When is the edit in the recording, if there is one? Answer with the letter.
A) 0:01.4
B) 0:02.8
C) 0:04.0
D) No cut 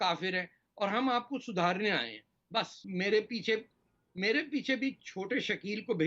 B